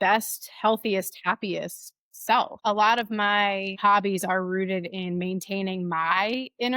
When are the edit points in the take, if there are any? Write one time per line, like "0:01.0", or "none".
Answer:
0:02.5
0:03.8